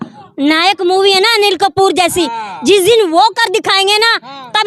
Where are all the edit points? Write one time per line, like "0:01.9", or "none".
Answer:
none